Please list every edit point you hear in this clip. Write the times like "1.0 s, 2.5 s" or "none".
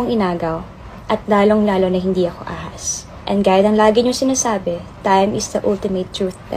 none